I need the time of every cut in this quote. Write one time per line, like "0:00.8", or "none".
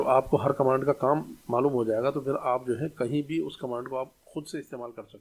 none